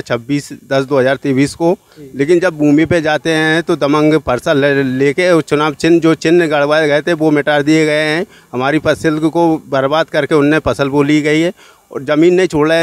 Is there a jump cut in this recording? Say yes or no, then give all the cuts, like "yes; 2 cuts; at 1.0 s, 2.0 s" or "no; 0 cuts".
no; 0 cuts